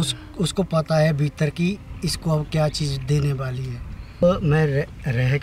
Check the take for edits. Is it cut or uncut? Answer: cut